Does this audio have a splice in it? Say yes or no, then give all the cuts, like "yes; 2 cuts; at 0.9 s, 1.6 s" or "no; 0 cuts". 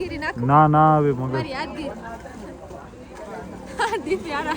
no; 0 cuts